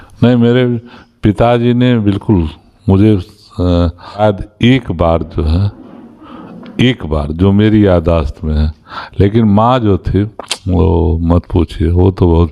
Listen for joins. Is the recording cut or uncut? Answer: cut